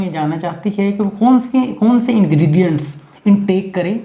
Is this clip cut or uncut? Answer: uncut